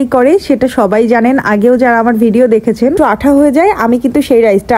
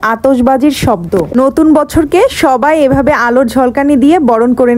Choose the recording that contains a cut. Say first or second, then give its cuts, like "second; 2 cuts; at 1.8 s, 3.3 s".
first; 1 cut; at 2.9 s